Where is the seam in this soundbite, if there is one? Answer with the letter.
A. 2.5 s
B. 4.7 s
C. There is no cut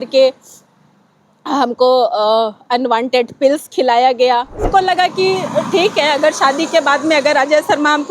B